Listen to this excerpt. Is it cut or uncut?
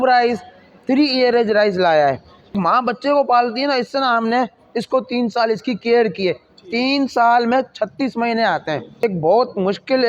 cut